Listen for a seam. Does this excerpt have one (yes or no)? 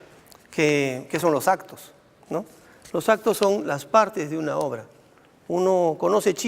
yes